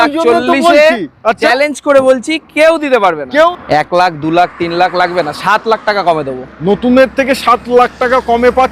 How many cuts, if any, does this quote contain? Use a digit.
1